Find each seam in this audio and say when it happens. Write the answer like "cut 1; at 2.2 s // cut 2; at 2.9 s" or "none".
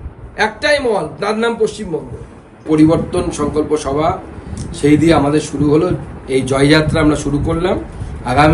cut 1; at 2.7 s